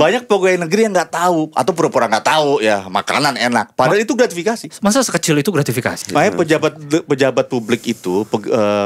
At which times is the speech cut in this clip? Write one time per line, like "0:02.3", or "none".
0:06.0